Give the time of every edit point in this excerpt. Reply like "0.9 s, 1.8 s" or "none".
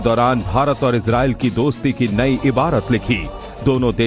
2.1 s